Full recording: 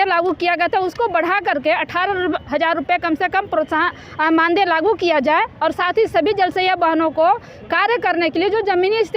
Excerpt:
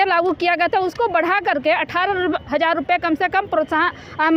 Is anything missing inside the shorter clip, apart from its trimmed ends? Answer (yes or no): no